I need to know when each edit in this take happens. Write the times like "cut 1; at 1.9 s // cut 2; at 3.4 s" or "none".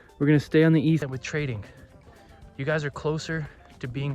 cut 1; at 1.0 s